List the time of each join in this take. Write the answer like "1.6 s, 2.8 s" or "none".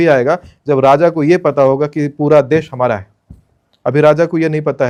none